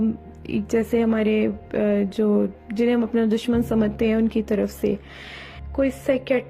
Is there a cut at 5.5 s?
yes; 1 cut; at 5.5 s

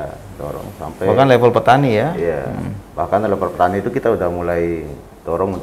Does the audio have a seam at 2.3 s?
no; 0 cuts

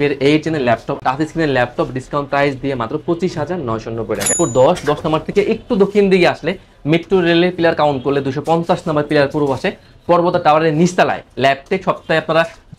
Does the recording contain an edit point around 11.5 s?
no; 2 cuts; at 0.9 s, 4.3 s

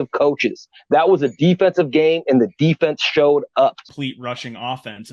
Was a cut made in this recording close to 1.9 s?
no; 1 cut; at 3.8 s

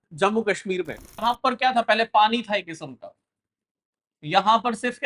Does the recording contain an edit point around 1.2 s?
yes; 1 cut; at 1.2 s

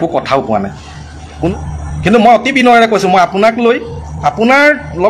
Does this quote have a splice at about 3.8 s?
no; 1 cut; at 1.5 s

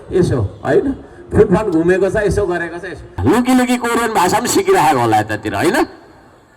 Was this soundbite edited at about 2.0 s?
no; 1 cut; at 3.2 s

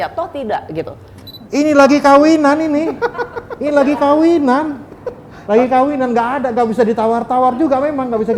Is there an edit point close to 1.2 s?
yes; 1 cut; at 1.2 s

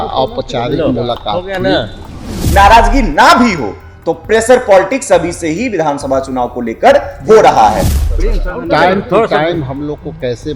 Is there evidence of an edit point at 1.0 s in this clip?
no; 2 cuts; at 2.4 s, 8.0 s

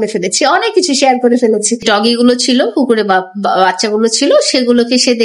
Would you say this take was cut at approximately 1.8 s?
yes; 1 cut; at 1.8 s

